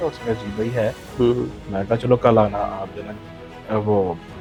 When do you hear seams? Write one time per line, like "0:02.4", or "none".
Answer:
none